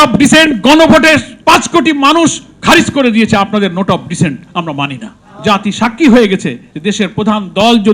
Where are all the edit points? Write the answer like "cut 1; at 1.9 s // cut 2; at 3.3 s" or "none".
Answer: cut 1; at 1.3 s // cut 2; at 5.1 s